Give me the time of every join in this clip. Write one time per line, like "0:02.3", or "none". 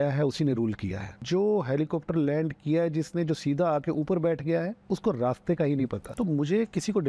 0:01.1
0:04.8
0:06.0